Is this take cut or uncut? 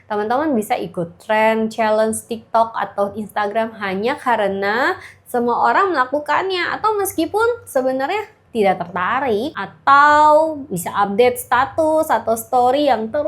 cut